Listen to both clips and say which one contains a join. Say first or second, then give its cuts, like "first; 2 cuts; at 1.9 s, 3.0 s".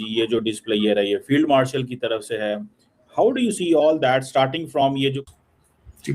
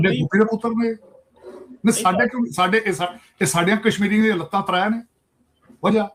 first; 1 cut; at 5.2 s